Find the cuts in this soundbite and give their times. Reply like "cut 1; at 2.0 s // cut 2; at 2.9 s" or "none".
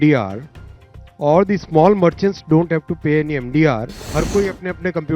cut 1; at 4.0 s